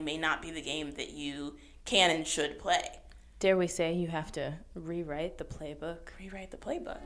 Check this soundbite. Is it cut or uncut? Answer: uncut